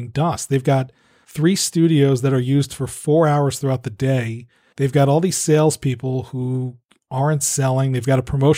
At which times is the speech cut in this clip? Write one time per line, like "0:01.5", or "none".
none